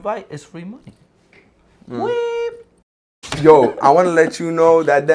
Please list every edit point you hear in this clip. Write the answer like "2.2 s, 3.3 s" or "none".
3.3 s

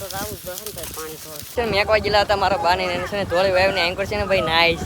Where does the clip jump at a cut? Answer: 1.5 s

